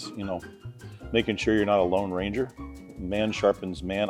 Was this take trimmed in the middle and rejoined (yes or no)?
no